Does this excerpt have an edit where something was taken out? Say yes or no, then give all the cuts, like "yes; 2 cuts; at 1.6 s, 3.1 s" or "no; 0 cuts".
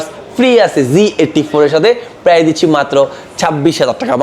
no; 0 cuts